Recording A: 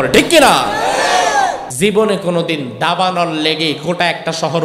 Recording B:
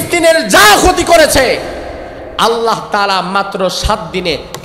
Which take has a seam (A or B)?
A